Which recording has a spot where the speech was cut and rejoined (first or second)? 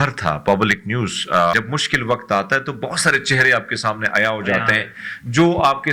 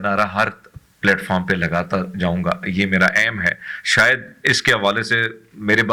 first